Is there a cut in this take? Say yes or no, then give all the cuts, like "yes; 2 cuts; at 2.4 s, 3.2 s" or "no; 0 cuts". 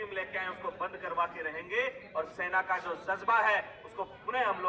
no; 0 cuts